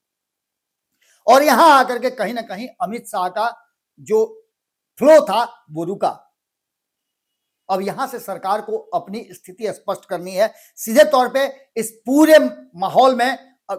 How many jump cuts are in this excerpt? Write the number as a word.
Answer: zero